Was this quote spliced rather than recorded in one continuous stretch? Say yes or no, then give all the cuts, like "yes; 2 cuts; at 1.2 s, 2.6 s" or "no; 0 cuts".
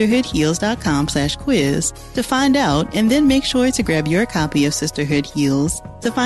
no; 0 cuts